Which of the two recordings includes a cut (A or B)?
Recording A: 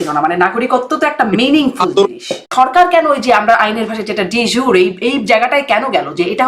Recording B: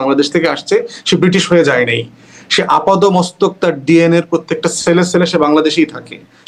A